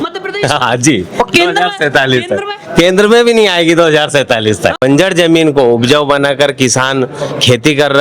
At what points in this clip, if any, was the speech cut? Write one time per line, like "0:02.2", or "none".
0:04.8